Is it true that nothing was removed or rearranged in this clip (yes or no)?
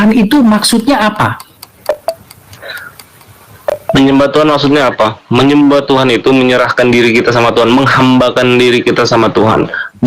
yes